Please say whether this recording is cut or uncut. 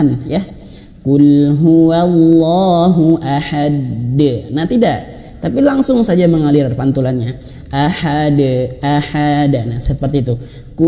uncut